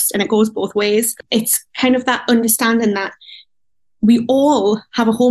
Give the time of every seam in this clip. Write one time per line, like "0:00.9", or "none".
none